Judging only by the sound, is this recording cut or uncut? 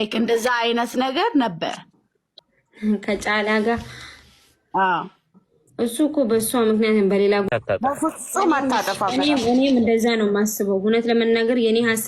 uncut